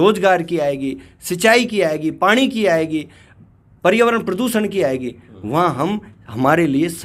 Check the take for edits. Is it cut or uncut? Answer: uncut